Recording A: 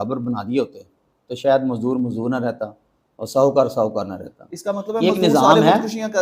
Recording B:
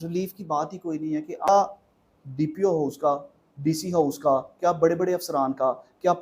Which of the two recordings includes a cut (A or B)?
B